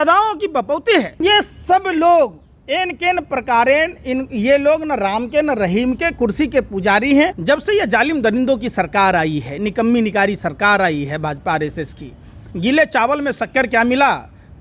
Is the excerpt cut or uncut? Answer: cut